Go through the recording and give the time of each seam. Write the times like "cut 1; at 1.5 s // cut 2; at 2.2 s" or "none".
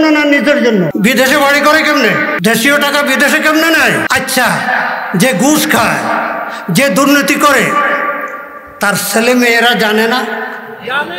cut 1; at 0.9 s // cut 2; at 2.4 s // cut 3; at 4.1 s